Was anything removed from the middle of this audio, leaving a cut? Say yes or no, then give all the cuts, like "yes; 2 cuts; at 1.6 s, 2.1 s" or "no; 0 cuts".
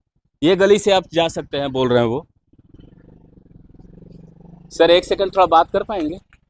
no; 0 cuts